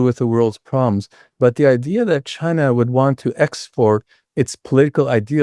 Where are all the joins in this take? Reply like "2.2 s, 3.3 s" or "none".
2.3 s